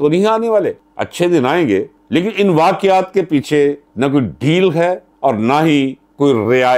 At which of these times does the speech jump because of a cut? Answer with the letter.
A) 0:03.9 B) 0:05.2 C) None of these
C